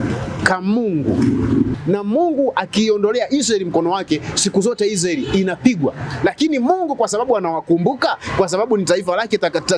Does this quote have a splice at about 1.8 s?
yes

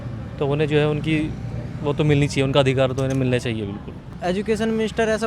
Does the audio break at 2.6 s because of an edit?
no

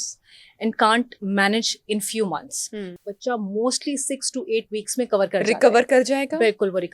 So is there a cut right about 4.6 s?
no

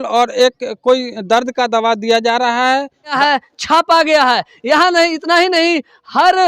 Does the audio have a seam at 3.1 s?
yes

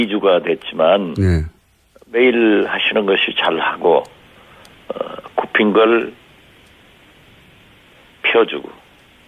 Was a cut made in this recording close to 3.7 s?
yes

